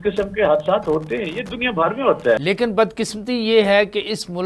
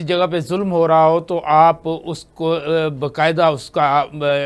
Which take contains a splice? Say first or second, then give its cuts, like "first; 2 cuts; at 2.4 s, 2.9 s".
first; 1 cut; at 2.4 s